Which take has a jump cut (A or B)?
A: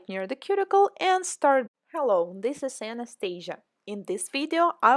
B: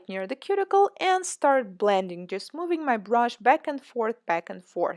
B